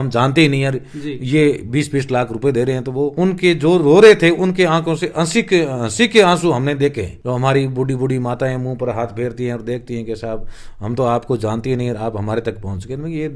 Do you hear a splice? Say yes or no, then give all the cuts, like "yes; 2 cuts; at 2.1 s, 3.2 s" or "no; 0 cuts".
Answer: no; 0 cuts